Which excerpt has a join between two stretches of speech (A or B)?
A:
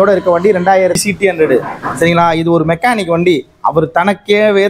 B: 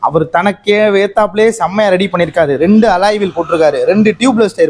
A